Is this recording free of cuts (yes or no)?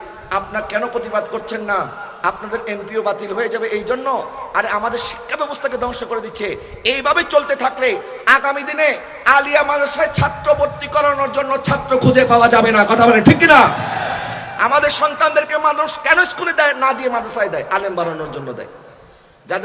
yes